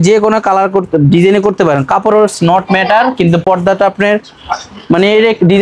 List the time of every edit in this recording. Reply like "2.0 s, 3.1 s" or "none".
none